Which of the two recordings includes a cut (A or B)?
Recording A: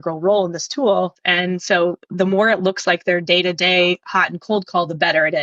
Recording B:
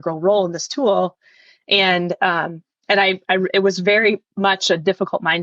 A